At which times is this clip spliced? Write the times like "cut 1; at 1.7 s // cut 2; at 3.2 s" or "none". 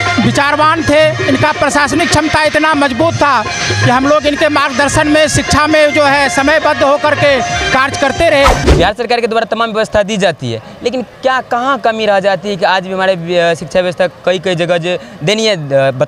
cut 1; at 8.6 s